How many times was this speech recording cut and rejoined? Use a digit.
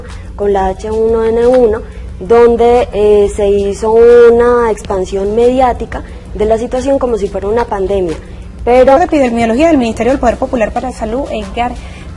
0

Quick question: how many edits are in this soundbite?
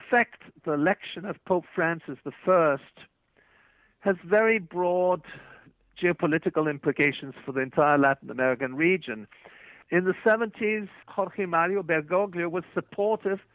2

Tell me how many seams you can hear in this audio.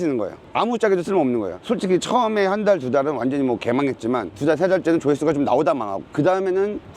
2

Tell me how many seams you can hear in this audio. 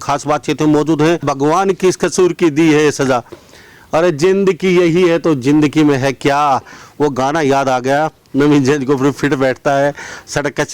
1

